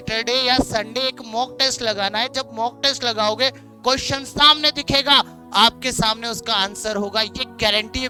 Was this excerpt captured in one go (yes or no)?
yes